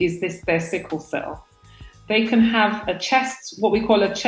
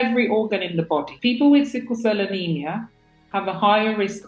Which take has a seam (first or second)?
second